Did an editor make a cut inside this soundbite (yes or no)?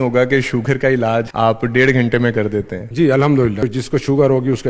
yes